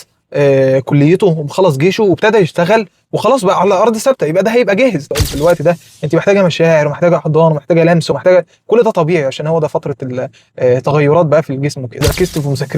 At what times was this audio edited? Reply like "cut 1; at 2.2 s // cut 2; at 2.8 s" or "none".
cut 1; at 5.1 s // cut 2; at 12.0 s